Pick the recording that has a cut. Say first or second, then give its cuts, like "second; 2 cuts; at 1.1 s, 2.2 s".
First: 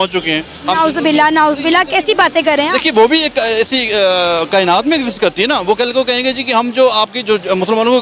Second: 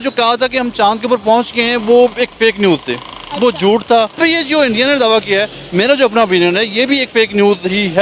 second; 1 cut; at 4.2 s